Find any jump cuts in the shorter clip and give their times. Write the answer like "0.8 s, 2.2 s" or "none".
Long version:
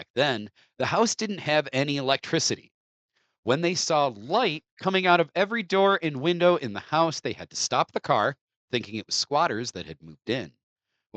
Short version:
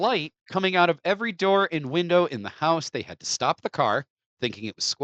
none